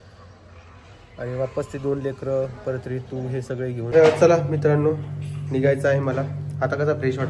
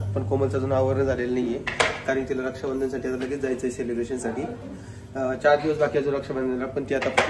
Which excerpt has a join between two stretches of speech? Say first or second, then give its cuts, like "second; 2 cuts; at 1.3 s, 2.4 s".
first; 1 cut; at 3.9 s